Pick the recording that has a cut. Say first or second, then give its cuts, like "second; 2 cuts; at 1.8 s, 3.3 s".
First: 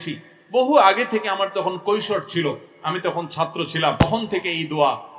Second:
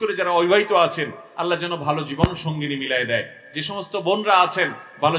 first; 1 cut; at 4.0 s